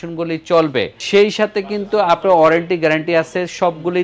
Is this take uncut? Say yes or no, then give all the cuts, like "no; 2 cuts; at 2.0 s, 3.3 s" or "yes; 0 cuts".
no; 1 cut; at 1.0 s